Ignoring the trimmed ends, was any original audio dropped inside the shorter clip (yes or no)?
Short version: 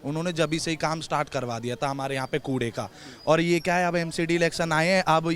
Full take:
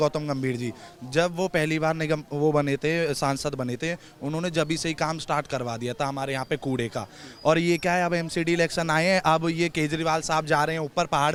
no